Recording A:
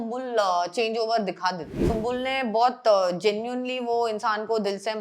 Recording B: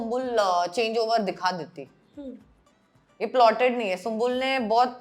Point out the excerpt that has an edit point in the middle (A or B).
A